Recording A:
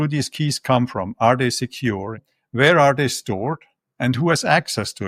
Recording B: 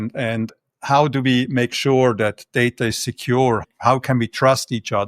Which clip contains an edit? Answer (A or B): B